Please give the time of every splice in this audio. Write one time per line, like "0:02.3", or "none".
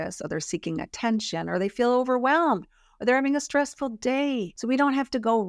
0:04.5